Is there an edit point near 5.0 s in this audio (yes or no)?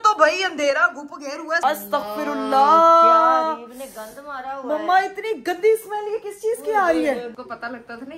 no